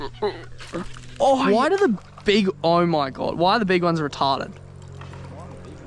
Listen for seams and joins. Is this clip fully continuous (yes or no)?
no